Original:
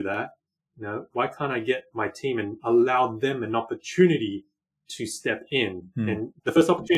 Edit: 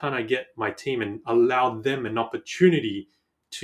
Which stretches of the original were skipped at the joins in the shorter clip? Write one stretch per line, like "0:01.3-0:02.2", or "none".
none